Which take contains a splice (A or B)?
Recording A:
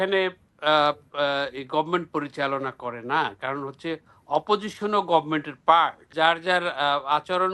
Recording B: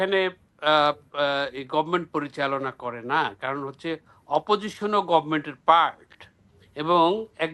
A